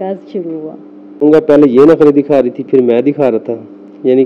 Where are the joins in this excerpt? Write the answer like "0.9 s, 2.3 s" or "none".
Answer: 1.3 s